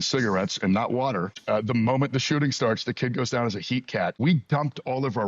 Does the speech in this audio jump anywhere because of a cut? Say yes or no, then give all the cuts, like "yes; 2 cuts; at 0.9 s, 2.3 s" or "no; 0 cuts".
yes; 2 cuts; at 1.4 s, 4.2 s